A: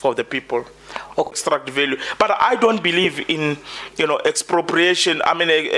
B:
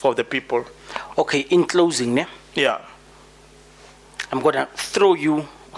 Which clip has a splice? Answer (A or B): A